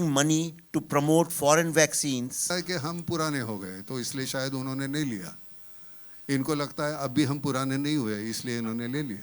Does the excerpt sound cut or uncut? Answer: cut